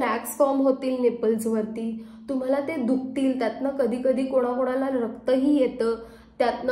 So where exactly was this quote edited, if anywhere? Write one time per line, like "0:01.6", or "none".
none